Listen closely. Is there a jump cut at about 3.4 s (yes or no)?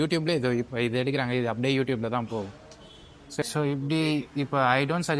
yes